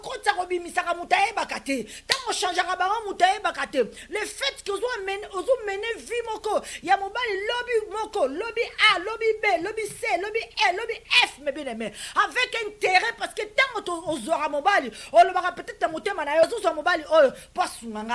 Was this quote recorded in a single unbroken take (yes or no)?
yes